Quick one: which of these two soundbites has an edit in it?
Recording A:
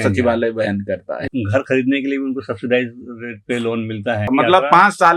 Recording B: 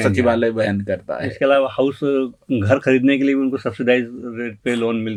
A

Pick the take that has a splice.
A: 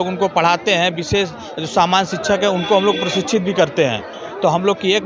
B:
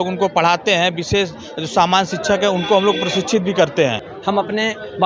B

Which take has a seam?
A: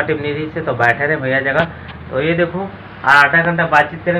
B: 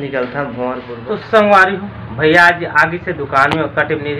B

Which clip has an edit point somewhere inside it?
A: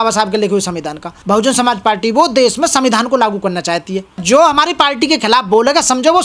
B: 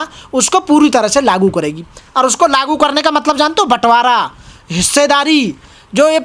A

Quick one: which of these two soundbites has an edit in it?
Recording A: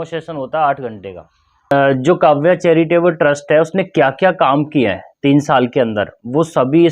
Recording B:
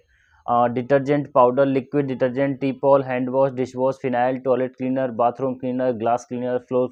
A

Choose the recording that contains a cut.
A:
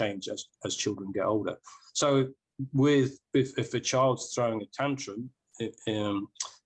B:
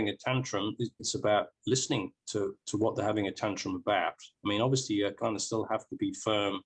B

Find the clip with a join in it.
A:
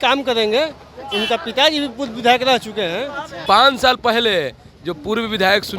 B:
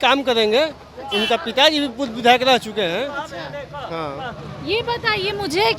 A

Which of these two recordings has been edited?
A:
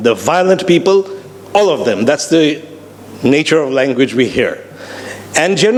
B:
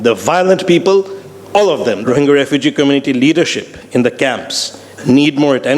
B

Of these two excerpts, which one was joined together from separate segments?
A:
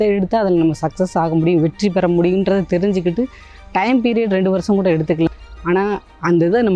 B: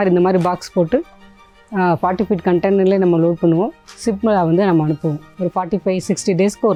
A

